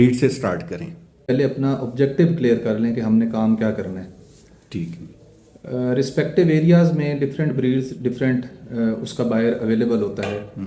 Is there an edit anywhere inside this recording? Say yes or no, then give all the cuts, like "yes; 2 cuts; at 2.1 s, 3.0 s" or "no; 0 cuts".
yes; 1 cut; at 1.3 s